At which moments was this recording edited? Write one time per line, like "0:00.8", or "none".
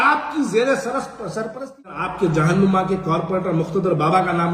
0:02.0